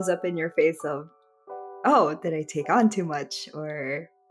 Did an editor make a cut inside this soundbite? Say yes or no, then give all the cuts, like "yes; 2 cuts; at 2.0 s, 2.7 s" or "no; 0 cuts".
no; 0 cuts